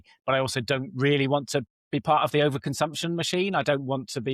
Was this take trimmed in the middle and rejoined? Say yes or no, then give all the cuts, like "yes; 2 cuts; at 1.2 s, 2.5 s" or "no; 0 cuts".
no; 0 cuts